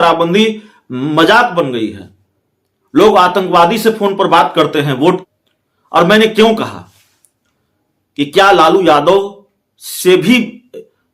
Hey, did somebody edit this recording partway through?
yes; 1 cut; at 5.2 s

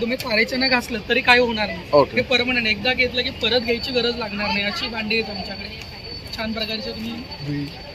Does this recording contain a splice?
no; 0 cuts

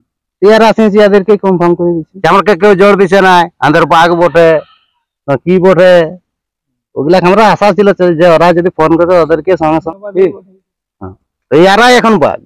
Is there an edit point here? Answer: yes; 2 cuts; at 2.1 s, 9.8 s

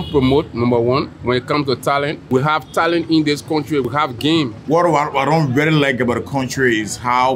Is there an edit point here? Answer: yes; 3 cuts; at 1.1 s, 2.2 s, 4.0 s

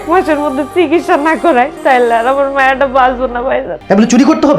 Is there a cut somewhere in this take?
yes; 2 cuts; at 1.8 s, 3.7 s

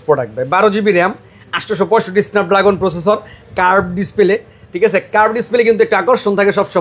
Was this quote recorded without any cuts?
yes; 0 cuts

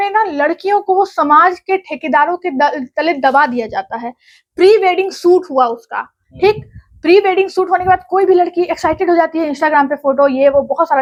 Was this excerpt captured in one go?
yes; 0 cuts

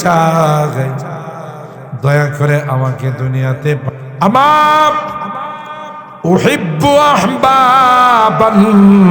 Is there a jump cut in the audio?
yes; 1 cut; at 3.8 s

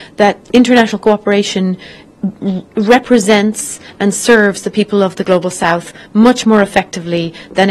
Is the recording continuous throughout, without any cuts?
yes; 0 cuts

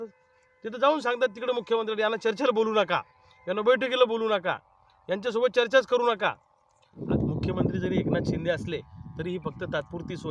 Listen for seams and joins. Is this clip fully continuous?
no; 1 cut; at 6.9 s

